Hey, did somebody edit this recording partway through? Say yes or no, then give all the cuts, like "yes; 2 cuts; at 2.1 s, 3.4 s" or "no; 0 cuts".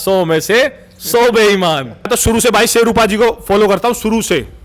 yes; 1 cut; at 2.1 s